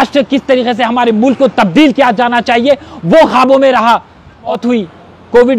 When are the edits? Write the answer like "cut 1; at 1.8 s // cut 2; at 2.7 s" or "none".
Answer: cut 1; at 4.5 s

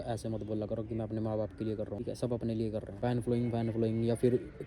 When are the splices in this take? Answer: cut 1; at 2.0 s // cut 2; at 2.9 s

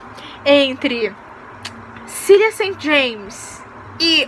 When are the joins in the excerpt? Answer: none

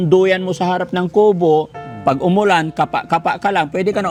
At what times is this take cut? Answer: none

